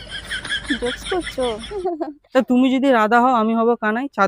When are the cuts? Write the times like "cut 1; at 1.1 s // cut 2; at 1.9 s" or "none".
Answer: cut 1; at 1.7 s